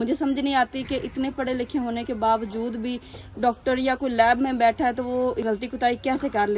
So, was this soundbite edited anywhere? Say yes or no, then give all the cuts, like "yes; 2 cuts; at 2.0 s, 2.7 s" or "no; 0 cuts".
yes; 1 cut; at 5.4 s